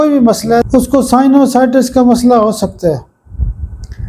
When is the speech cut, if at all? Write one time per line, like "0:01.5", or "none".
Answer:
none